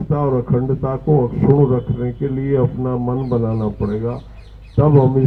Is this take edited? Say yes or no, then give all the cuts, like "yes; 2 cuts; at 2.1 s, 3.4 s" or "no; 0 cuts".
no; 0 cuts